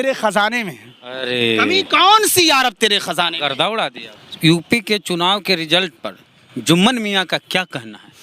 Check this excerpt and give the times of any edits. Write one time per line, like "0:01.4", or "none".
0:04.1